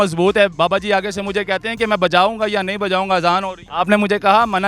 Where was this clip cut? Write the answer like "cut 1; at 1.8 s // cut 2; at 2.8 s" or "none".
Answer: cut 1; at 3.6 s